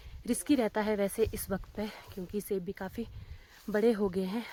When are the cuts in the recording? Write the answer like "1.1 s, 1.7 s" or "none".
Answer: none